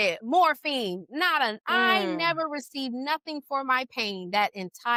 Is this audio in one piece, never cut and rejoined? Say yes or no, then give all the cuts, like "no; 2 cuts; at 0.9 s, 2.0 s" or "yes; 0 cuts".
yes; 0 cuts